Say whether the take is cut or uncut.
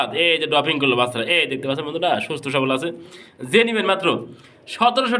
uncut